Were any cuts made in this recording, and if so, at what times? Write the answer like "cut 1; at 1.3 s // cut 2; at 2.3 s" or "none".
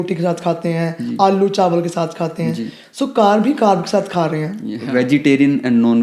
cut 1; at 4.7 s